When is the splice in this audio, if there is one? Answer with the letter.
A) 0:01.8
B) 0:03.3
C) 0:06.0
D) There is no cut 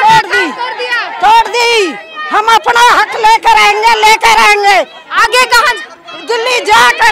D